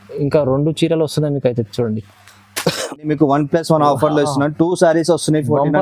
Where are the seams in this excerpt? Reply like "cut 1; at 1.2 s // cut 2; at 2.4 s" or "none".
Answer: cut 1; at 3.1 s